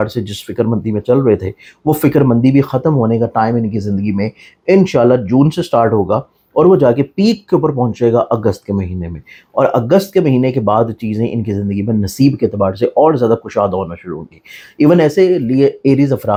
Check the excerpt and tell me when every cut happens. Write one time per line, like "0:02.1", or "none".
none